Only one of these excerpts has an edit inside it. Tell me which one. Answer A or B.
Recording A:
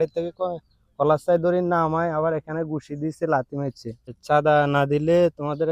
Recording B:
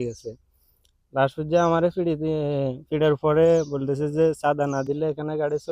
A